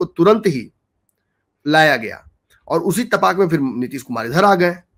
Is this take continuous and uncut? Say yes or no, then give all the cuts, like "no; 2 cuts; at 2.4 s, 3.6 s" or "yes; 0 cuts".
yes; 0 cuts